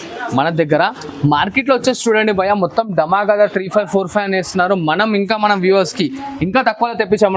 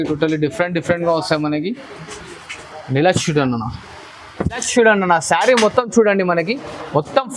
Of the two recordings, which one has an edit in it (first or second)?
second